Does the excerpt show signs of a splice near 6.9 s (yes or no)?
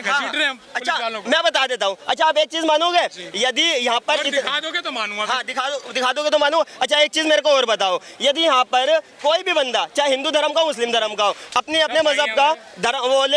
no